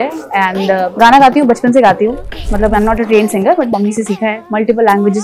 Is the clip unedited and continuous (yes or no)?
no